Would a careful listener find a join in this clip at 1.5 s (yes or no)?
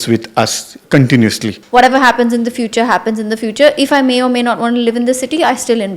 yes